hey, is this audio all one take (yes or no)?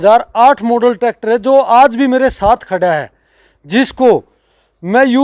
yes